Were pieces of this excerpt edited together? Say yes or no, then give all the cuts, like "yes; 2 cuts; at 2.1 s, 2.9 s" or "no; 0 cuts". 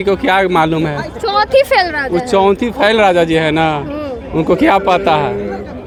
no; 0 cuts